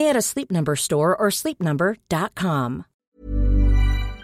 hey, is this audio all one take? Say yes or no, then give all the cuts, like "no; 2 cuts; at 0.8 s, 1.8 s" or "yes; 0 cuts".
no; 1 cut; at 3.0 s